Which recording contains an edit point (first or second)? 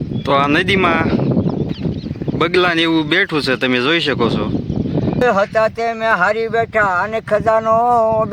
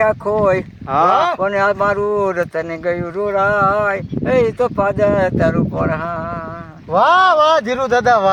first